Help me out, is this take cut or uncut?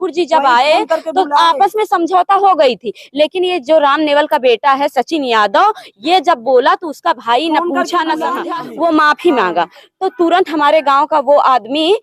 cut